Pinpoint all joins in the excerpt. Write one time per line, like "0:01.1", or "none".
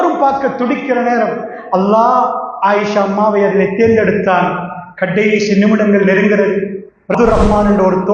0:07.1